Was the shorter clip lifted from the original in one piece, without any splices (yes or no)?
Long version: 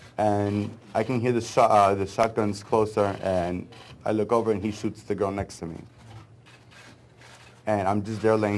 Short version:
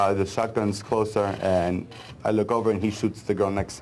yes